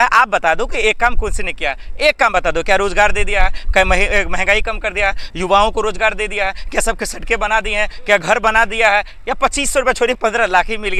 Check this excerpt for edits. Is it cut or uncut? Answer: uncut